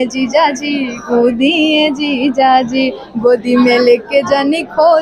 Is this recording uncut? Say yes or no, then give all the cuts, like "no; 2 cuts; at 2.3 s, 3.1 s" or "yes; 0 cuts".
yes; 0 cuts